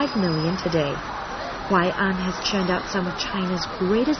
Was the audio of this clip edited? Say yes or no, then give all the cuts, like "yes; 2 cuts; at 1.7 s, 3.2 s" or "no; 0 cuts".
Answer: yes; 1 cut; at 3.2 s